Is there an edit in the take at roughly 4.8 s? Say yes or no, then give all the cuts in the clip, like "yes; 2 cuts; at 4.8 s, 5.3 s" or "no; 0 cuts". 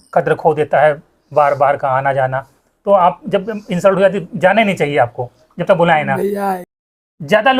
no; 1 cut; at 6.7 s